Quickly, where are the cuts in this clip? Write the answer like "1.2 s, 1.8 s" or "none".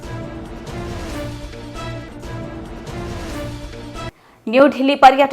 4.0 s